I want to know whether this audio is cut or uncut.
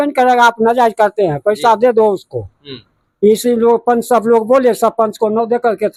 uncut